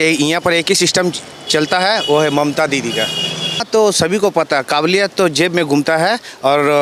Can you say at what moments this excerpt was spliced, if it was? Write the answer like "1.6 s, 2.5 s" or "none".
3.6 s